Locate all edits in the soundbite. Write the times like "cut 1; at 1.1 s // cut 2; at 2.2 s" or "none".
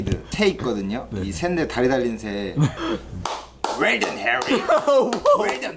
cut 1; at 2.8 s

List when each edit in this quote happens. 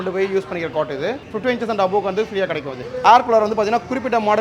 cut 1; at 2.8 s

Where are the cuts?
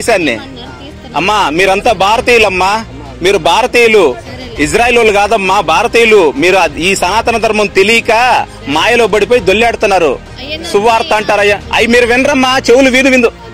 none

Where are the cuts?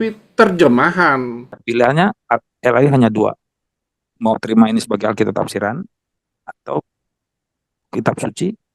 cut 1; at 1.4 s

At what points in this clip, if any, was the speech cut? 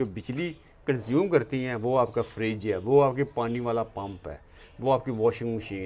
none

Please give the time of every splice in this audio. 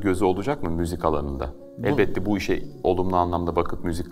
none

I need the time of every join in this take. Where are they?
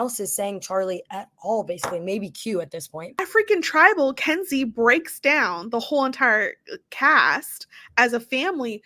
cut 1; at 3.0 s

